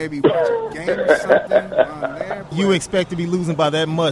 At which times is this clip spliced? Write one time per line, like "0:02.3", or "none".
0:02.5